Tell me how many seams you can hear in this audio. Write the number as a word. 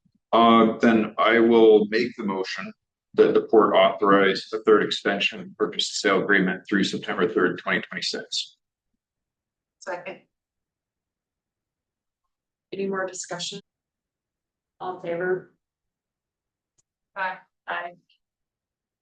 one